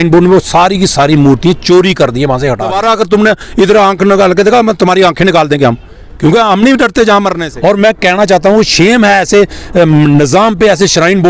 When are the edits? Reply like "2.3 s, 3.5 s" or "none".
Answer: 2.8 s, 7.4 s